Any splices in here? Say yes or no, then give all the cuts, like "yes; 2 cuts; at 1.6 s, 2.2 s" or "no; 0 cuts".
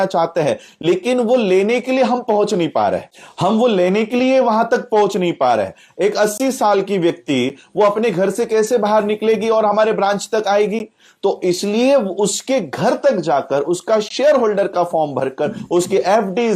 yes; 1 cut; at 3.2 s